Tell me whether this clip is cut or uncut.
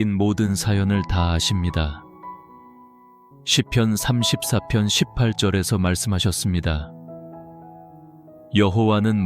cut